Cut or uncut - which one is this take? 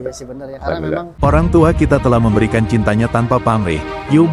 cut